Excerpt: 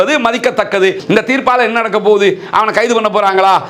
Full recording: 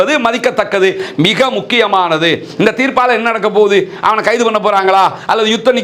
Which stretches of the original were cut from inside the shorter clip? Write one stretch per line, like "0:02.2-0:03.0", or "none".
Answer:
0:01.0-0:02.5